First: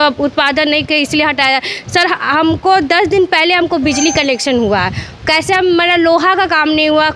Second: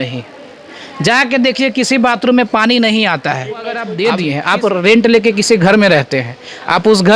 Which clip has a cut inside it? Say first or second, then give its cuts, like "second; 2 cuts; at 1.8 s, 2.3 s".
second; 1 cut; at 3.9 s